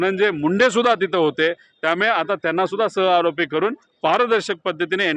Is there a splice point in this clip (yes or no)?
no